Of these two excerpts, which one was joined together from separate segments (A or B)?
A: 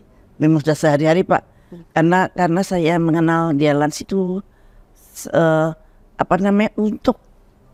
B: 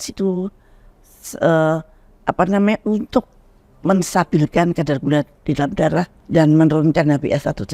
B